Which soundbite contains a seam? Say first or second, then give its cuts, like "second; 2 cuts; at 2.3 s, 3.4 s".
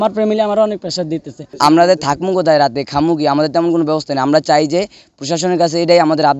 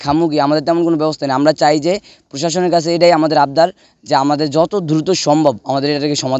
first; 1 cut; at 1.4 s